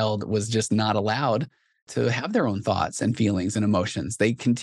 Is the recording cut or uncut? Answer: uncut